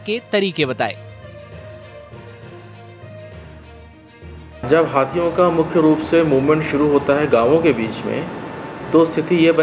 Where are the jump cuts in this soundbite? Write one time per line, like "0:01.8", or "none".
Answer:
0:01.1
0:02.9
0:04.1